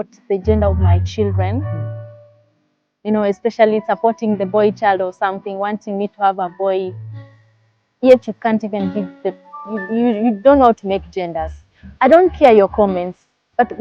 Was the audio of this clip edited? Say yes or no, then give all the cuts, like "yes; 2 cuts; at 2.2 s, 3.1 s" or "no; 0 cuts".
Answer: no; 0 cuts